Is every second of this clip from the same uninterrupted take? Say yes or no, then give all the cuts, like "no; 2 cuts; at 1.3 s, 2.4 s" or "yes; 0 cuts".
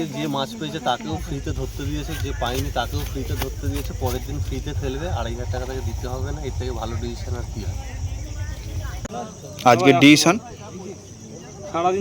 no; 1 cut; at 9.0 s